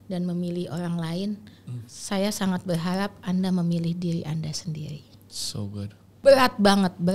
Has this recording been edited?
yes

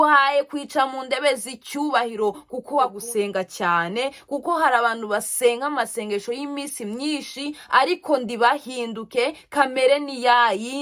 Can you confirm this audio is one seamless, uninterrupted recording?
no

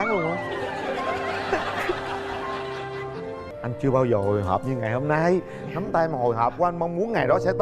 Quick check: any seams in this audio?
no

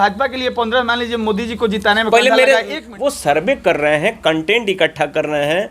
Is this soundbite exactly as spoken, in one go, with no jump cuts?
no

